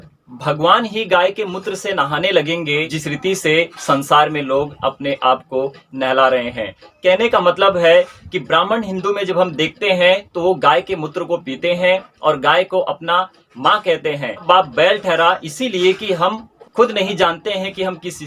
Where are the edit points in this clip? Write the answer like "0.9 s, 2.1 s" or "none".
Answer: 2.9 s